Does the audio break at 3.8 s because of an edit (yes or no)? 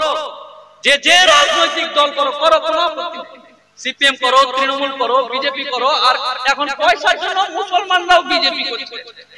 no